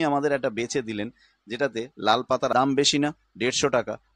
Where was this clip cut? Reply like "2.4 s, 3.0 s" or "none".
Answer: 2.5 s